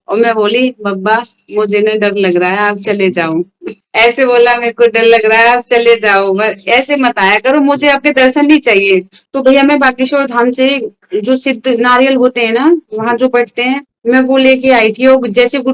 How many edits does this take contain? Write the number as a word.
one